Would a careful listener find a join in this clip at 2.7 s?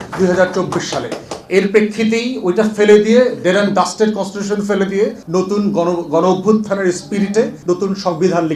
no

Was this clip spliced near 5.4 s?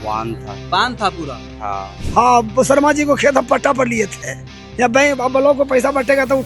no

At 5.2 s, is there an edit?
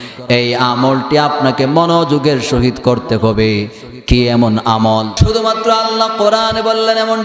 yes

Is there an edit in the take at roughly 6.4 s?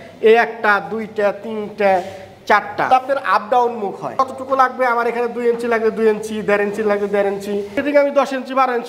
no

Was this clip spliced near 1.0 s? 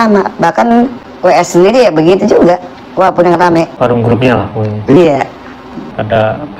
yes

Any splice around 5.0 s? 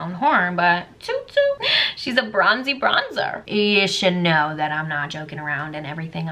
no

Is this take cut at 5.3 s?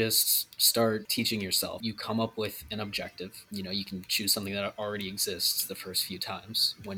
no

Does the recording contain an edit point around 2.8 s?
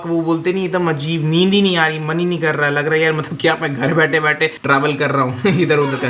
no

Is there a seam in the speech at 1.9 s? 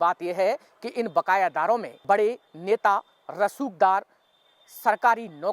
yes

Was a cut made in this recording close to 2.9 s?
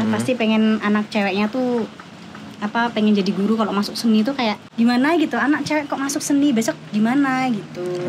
no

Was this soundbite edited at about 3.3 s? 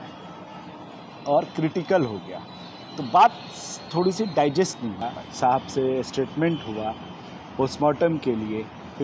no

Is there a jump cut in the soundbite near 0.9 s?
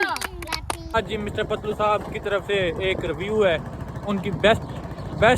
yes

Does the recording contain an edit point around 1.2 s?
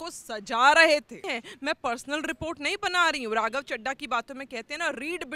yes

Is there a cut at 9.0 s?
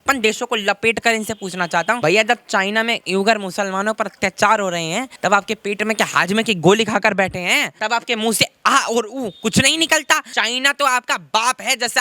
no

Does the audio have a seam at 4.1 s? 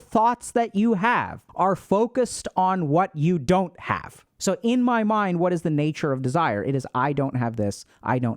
no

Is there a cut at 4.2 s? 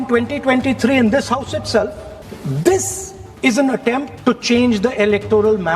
no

